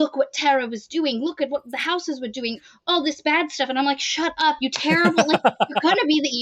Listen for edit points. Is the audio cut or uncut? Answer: cut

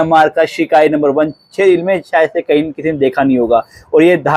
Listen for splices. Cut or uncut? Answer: uncut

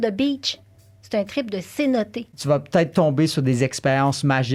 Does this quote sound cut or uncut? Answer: cut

